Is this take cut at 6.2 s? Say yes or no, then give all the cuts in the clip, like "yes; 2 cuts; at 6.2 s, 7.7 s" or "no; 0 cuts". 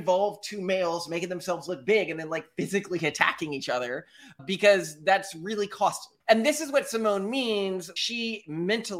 yes; 2 cuts; at 6.2 s, 7.9 s